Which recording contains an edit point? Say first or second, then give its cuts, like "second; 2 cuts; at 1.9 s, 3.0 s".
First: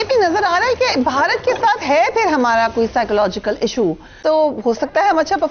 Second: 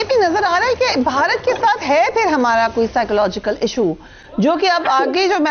first; 1 cut; at 4.2 s